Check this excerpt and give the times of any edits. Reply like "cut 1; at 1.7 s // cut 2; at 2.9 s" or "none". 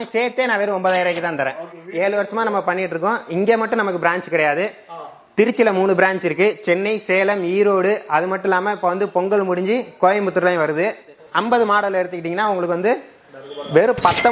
cut 1; at 1.8 s // cut 2; at 11.2 s